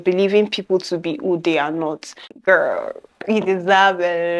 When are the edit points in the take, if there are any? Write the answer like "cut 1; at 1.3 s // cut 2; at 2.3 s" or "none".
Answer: cut 1; at 2.2 s